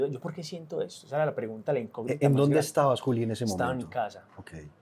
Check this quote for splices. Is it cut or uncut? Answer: uncut